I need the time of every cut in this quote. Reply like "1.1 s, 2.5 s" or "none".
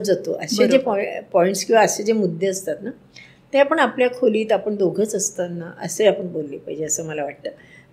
none